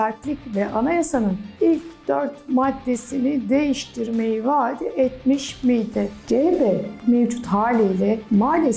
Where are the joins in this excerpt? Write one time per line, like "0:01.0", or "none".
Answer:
0:06.2